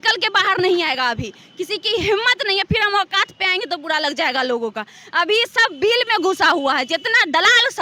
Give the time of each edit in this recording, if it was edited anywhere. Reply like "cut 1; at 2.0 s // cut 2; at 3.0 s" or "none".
none